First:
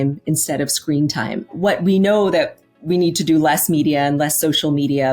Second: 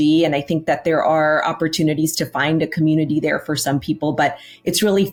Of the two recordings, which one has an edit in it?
first; 1 cut; at 1.5 s

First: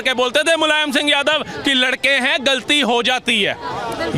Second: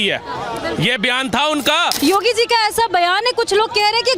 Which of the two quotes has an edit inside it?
second; 1 cut; at 1.9 s

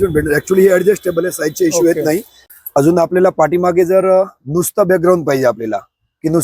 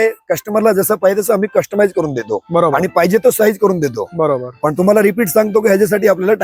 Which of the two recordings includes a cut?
first; 1 cut; at 2.4 s

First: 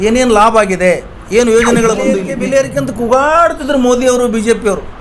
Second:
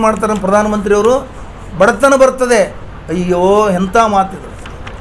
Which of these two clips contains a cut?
first; 1 cut; at 2.3 s

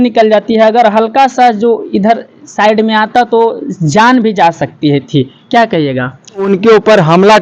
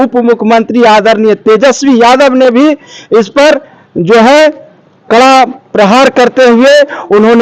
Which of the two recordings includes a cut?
first; 1 cut; at 6.4 s

